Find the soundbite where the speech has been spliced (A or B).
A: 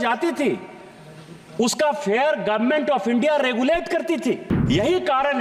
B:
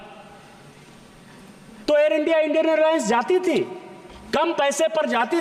A